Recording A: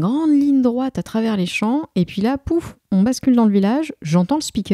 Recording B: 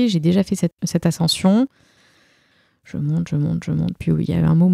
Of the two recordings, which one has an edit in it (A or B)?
B